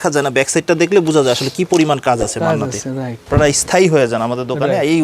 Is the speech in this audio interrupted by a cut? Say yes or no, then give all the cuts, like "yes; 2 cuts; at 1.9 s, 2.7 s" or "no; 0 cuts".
yes; 1 cut; at 3.2 s